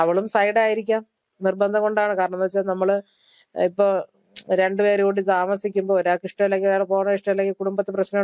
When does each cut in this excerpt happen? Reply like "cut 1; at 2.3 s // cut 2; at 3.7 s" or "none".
none